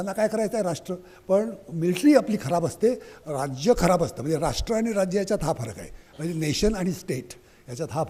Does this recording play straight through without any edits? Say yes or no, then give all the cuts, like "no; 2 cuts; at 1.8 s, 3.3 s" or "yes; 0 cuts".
yes; 0 cuts